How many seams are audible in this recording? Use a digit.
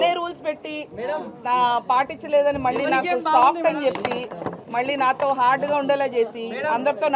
0